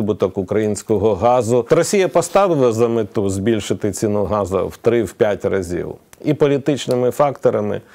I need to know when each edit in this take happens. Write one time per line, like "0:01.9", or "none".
0:01.6

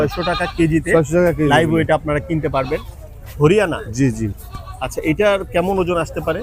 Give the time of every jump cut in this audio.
0:02.9

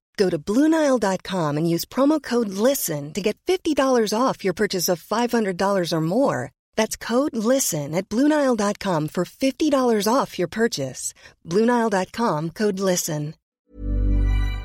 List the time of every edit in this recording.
0:13.5

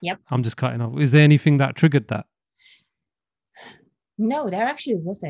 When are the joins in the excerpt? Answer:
none

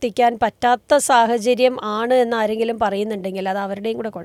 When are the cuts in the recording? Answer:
none

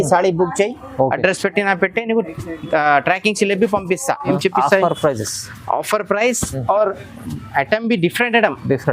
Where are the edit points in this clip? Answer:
0:04.4

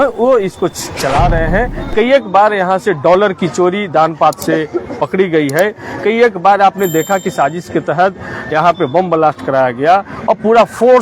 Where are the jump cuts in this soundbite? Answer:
none

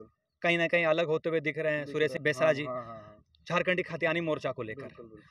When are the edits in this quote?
0:02.2

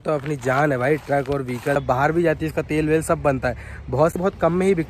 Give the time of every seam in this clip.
0:01.8
0:04.2

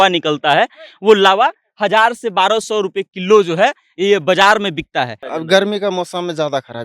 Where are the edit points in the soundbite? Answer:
0:05.2

